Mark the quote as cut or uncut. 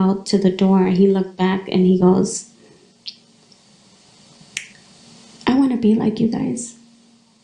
uncut